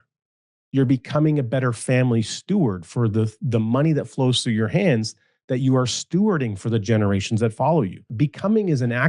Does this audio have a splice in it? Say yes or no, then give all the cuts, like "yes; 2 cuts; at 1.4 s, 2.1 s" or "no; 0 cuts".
yes; 1 cut; at 8.1 s